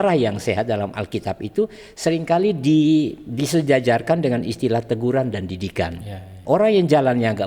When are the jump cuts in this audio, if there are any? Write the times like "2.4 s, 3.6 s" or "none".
6.3 s

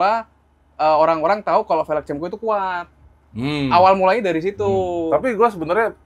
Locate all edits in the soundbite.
none

